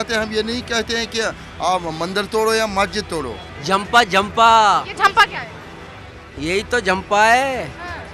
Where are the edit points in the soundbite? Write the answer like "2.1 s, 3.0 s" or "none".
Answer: 3.5 s